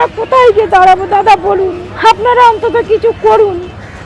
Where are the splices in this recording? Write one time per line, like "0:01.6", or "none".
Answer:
0:01.8